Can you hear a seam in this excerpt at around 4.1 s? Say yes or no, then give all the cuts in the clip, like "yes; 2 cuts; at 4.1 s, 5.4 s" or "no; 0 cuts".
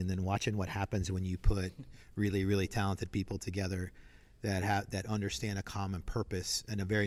no; 0 cuts